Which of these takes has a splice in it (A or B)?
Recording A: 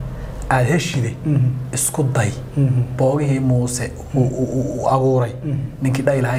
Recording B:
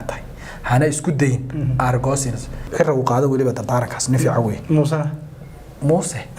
B